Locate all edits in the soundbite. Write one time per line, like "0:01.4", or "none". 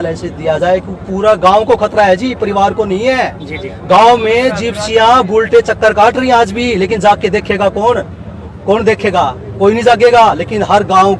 none